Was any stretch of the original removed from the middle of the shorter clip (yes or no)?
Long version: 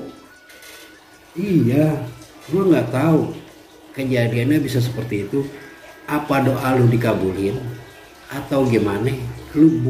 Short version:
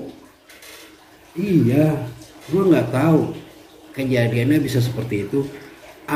no